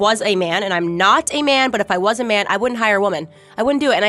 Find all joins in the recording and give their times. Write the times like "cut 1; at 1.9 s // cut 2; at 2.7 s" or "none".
none